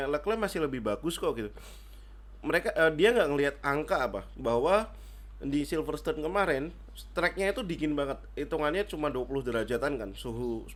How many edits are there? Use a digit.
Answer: 0